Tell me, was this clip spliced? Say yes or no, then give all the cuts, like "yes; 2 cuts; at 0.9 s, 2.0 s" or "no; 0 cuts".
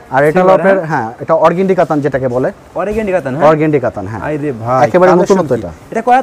no; 0 cuts